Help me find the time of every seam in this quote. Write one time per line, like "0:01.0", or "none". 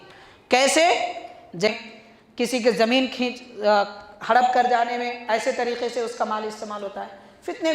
0:01.7